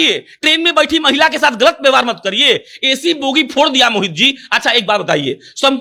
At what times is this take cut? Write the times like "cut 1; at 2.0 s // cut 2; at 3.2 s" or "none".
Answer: none